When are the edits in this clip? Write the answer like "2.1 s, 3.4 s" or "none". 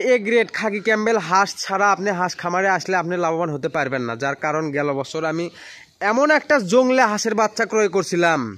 none